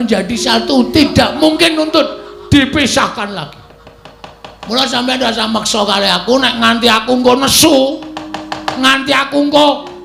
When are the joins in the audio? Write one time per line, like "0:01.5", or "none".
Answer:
none